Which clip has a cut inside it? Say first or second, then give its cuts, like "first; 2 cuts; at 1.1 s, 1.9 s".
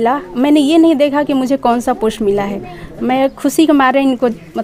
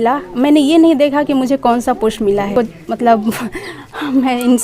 second; 1 cut; at 2.5 s